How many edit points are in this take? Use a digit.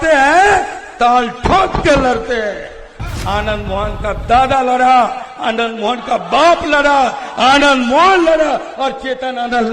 1